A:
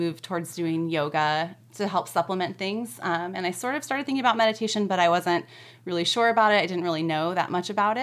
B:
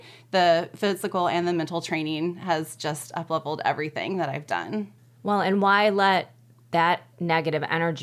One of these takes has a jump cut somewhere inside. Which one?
B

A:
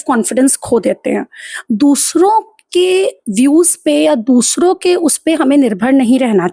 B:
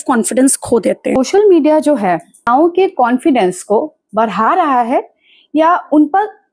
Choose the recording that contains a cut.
B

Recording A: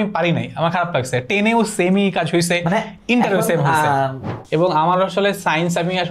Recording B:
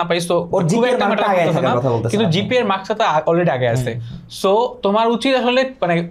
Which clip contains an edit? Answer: A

